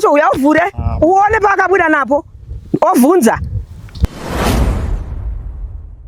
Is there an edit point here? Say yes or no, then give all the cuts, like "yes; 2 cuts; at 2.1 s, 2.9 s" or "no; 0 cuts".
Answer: no; 0 cuts